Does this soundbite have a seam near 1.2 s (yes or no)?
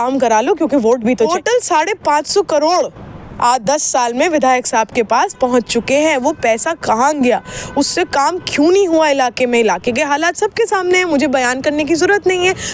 yes